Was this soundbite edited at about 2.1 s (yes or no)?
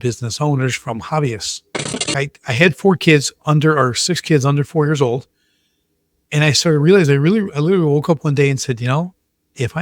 yes